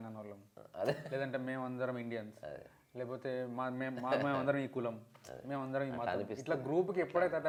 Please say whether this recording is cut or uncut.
uncut